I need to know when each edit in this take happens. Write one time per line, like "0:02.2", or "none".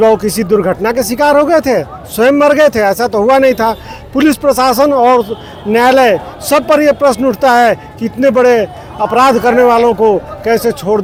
none

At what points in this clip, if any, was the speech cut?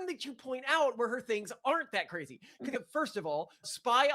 0:02.7

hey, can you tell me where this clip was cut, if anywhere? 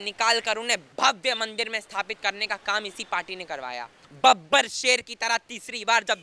0:00.9
0:04.0

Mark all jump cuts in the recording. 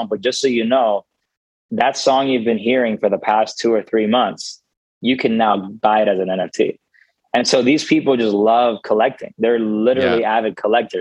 none

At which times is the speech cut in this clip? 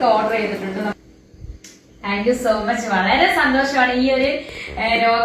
0:01.0

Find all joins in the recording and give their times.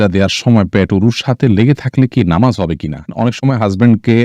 0:03.1

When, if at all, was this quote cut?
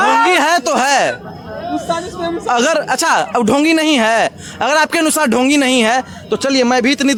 none

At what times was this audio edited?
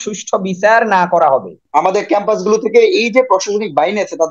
0:01.6

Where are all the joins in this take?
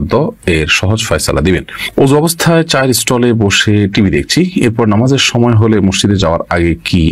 0:01.8

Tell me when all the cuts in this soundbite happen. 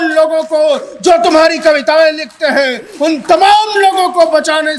none

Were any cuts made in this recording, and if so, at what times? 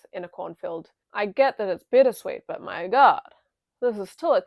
0:01.0

